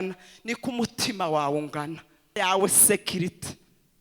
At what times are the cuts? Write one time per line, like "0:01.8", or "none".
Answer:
0:02.4